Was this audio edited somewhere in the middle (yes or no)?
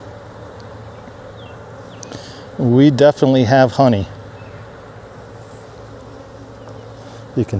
no